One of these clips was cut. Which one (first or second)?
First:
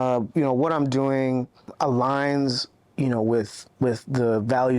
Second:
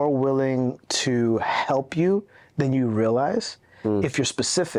first